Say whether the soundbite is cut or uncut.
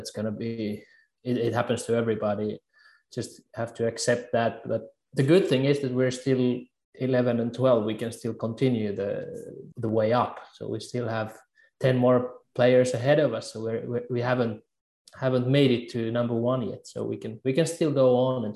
cut